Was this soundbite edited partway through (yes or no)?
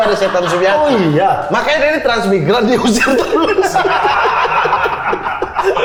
no